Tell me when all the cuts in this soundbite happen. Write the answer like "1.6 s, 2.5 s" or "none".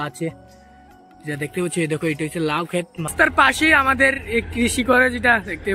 3.1 s